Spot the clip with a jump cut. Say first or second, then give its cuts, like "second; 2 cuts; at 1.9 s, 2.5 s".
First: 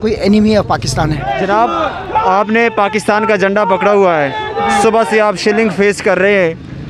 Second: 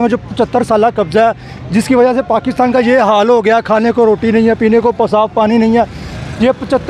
first; 1 cut; at 1.3 s